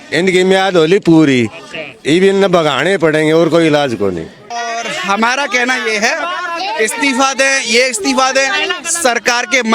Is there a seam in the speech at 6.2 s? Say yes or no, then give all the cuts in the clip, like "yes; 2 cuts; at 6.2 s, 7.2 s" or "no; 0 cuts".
no; 1 cut; at 4.7 s